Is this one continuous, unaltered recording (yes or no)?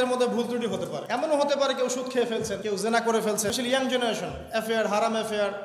no